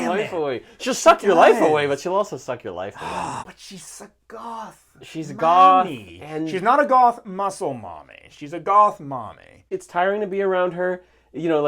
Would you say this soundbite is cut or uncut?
cut